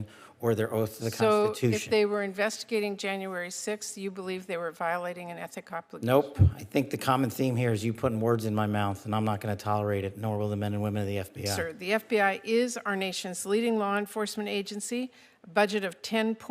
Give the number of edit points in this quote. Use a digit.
1